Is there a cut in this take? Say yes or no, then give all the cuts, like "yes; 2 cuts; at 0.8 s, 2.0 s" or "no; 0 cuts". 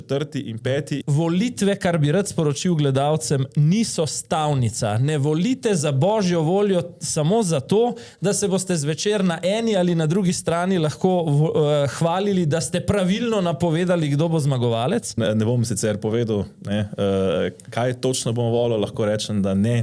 yes; 2 cuts; at 1.0 s, 15.2 s